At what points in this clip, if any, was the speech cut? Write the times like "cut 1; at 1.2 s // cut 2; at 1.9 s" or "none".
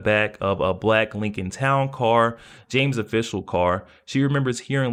none